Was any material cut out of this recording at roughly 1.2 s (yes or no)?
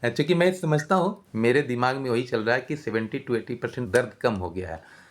yes